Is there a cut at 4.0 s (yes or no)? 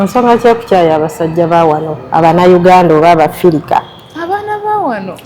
no